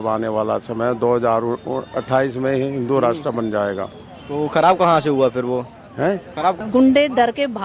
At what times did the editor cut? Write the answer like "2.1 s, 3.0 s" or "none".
6.6 s